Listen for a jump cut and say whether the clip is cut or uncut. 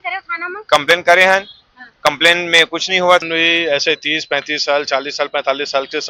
cut